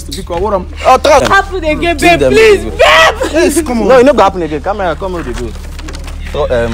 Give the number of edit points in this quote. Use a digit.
1